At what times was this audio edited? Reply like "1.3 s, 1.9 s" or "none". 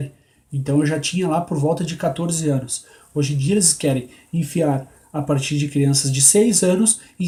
none